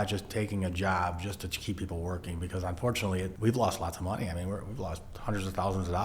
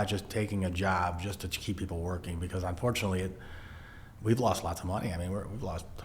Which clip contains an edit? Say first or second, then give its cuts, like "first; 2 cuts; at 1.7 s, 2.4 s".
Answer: first; 1 cut; at 3.3 s